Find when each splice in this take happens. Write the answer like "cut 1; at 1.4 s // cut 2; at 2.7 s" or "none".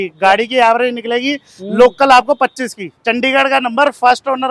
cut 1; at 2.9 s